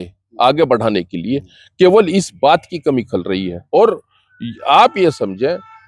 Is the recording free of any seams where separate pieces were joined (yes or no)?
yes